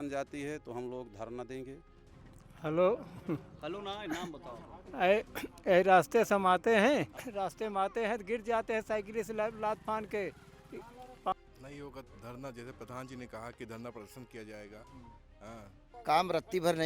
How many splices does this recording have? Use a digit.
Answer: 3